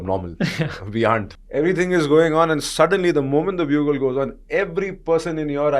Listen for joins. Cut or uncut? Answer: cut